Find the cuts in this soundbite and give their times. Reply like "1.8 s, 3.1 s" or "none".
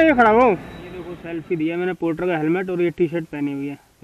1.2 s